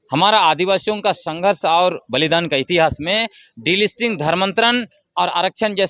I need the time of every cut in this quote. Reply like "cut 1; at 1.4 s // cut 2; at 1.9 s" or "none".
none